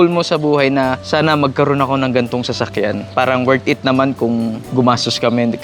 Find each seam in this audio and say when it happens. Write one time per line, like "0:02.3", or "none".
0:01.0
0:03.1
0:04.6